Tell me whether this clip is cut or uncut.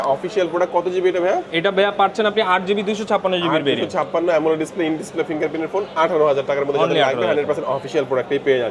uncut